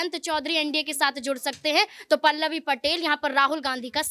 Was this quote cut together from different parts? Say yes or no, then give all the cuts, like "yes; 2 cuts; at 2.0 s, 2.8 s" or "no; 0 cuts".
no; 0 cuts